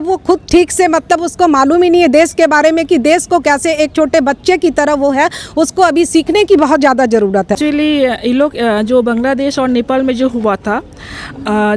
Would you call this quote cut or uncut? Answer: cut